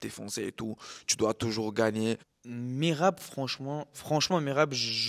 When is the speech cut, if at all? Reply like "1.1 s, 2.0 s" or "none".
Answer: 2.4 s, 4.0 s

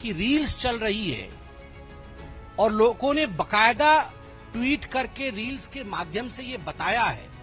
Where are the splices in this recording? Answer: none

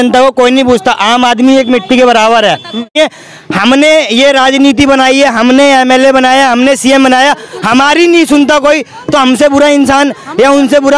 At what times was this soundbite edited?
3.0 s

